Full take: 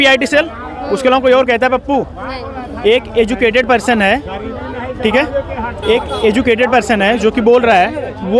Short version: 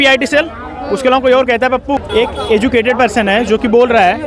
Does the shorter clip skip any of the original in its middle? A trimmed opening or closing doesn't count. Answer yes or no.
yes